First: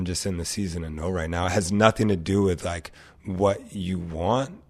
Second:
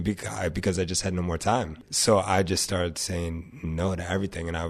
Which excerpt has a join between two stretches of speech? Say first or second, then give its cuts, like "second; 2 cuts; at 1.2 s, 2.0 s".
second; 1 cut; at 1.7 s